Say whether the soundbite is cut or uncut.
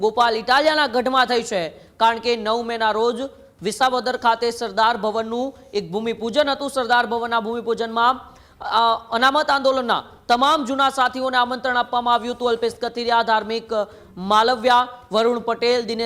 uncut